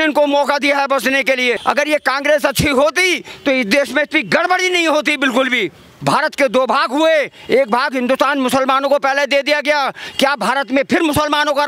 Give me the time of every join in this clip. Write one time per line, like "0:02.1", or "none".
0:01.6
0:05.9